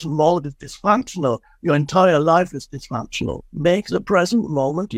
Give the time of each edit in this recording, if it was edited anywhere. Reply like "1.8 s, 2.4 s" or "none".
3.4 s